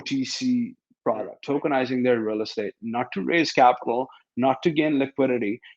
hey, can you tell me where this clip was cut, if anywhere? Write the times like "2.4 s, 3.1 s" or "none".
1.4 s